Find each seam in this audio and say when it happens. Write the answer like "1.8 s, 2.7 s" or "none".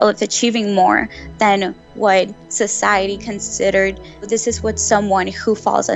4.3 s